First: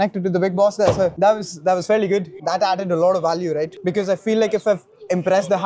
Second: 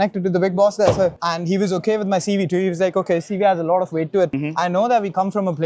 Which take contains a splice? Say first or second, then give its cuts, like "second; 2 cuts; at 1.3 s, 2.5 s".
second; 2 cuts; at 1.1 s, 4.4 s